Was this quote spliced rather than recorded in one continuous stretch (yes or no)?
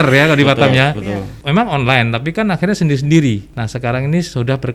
yes